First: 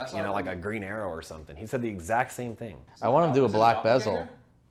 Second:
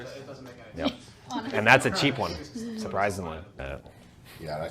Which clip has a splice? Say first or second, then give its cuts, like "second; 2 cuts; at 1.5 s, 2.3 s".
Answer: second; 1 cut; at 3.5 s